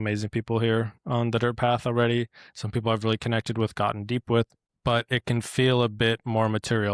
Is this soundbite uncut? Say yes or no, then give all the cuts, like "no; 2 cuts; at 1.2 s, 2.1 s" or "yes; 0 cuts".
no; 1 cut; at 4.6 s